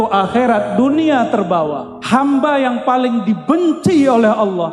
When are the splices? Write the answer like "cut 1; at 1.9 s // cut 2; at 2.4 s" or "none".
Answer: cut 1; at 1.9 s